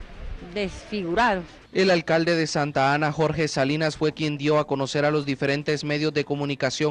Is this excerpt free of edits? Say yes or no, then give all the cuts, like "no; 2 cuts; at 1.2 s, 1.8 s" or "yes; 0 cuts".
yes; 0 cuts